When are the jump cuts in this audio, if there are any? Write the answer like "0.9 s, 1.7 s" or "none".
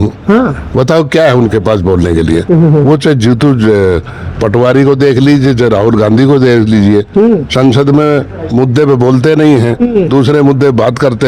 none